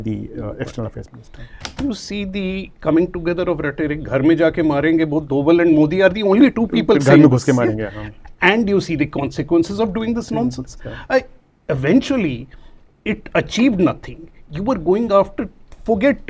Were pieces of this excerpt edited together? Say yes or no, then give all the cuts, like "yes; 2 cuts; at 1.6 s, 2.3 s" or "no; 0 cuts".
yes; 1 cut; at 1.8 s